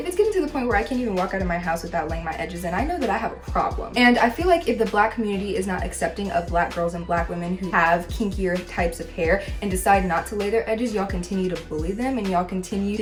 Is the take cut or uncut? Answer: uncut